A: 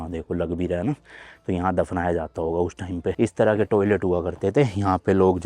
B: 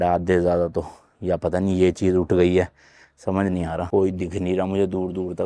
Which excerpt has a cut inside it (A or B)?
A